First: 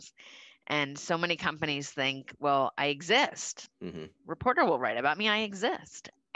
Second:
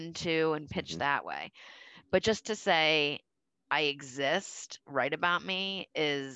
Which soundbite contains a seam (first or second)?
first